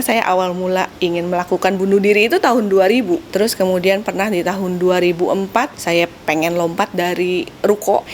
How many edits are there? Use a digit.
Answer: 3